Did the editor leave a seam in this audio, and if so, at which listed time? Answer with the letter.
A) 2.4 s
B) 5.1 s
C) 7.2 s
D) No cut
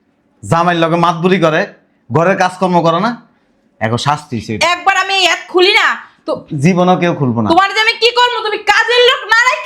D